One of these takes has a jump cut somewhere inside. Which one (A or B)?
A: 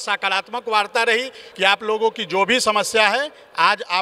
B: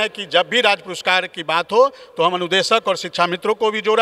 A